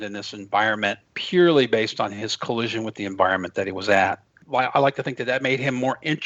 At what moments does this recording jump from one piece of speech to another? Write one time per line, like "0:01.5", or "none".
0:01.1
0:04.4